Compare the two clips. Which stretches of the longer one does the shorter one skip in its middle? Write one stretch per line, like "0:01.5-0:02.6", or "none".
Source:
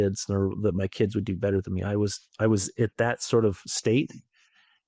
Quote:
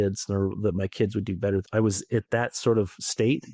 0:01.7-0:02.3